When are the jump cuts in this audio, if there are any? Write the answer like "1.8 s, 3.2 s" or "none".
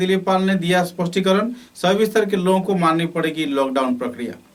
none